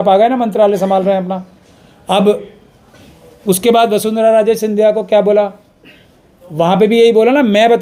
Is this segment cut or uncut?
uncut